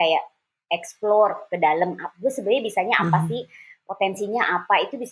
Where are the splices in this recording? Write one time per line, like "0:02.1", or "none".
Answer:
none